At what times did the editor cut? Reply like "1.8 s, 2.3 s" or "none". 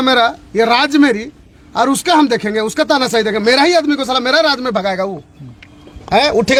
none